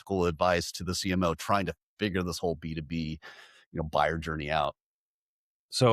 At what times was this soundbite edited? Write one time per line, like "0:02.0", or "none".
none